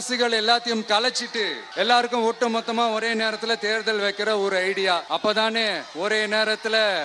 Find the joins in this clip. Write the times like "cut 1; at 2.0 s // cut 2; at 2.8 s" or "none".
cut 1; at 1.6 s // cut 2; at 5.0 s